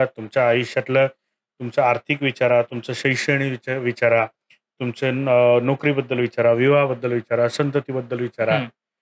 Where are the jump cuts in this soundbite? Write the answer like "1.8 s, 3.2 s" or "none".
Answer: none